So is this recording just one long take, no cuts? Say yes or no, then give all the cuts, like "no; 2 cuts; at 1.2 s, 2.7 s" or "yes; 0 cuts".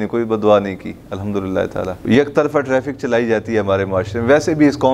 no; 1 cut; at 2.0 s